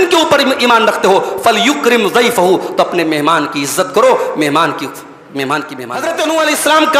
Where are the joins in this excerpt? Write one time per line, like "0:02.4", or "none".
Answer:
0:06.0